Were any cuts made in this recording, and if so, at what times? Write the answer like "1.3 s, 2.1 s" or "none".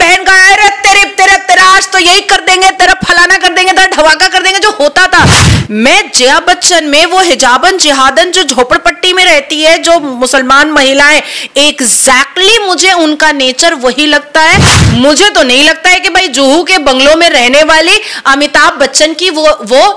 none